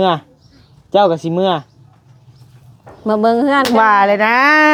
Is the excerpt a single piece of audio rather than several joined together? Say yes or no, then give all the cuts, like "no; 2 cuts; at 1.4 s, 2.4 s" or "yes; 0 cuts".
yes; 0 cuts